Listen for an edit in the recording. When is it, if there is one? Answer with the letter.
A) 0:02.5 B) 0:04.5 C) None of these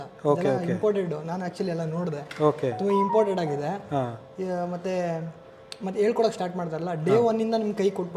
C